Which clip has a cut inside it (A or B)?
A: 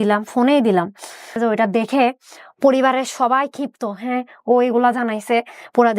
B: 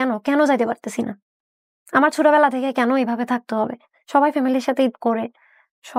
A